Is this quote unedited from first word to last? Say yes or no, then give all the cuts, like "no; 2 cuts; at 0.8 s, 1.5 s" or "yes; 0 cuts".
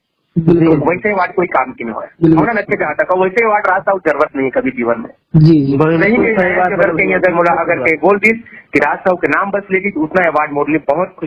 yes; 0 cuts